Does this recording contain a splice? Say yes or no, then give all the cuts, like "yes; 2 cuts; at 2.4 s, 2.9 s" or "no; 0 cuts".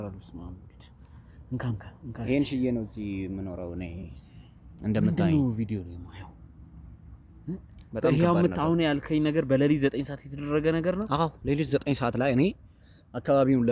no; 0 cuts